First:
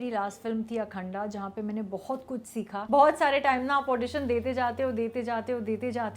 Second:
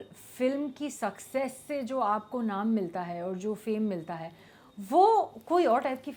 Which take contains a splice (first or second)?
first